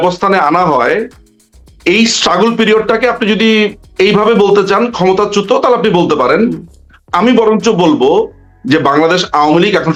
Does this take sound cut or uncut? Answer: uncut